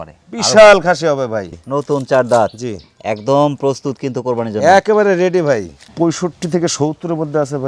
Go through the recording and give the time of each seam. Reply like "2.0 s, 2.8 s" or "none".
1.6 s, 5.8 s